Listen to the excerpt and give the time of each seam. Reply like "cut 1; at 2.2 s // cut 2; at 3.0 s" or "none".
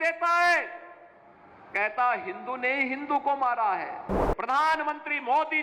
cut 1; at 4.2 s